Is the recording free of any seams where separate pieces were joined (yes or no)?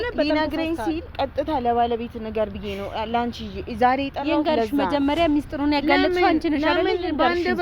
no